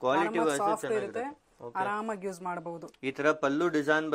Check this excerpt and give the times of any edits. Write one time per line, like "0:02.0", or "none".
none